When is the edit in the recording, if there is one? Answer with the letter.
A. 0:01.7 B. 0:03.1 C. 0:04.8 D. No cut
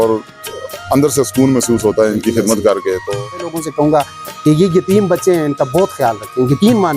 B